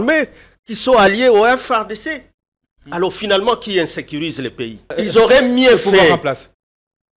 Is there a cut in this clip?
yes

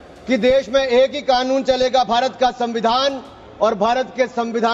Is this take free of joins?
yes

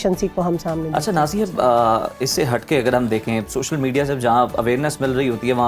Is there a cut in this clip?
no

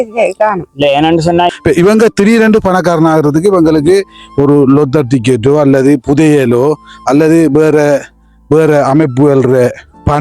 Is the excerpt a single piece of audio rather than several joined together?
no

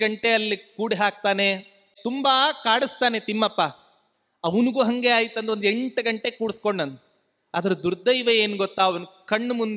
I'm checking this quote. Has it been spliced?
yes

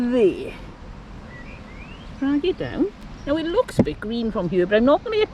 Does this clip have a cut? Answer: yes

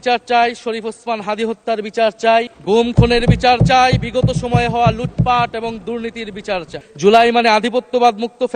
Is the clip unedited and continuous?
no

